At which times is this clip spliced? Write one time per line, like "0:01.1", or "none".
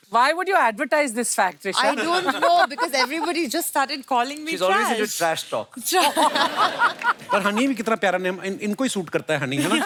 none